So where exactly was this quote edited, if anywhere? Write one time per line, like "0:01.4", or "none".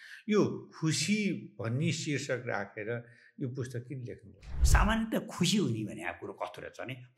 0:04.5